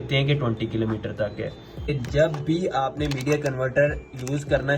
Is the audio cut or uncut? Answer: cut